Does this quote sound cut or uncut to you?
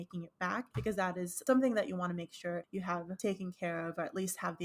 cut